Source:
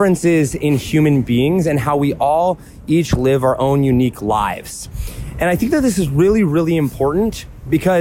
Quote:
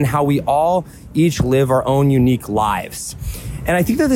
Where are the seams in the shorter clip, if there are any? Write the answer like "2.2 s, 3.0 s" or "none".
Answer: none